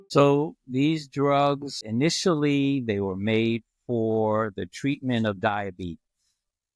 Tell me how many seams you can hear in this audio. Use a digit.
1